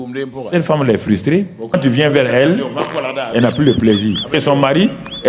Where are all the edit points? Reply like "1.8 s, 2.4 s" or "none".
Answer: 1.7 s, 4.4 s